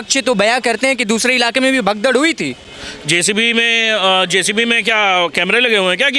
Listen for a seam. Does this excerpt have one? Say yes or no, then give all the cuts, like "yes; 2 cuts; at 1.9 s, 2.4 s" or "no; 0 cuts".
no; 0 cuts